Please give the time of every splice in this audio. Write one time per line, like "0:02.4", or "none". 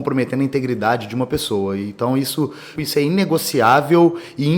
0:02.8